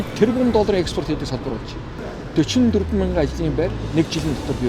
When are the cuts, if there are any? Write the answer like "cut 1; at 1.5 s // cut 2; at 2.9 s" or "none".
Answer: none